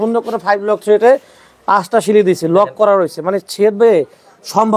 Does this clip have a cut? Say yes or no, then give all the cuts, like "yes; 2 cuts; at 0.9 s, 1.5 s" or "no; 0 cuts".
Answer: no; 0 cuts